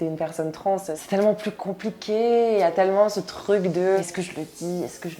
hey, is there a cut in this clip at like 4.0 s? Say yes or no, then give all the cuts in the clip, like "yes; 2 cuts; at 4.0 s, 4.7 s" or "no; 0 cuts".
yes; 2 cuts; at 1.0 s, 4.0 s